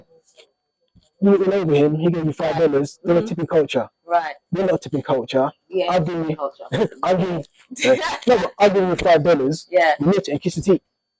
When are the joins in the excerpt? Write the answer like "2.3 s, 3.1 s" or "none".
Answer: none